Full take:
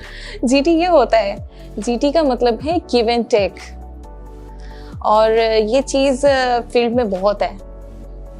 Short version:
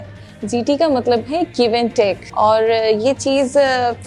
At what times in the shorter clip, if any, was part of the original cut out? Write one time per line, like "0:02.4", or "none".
0:02.2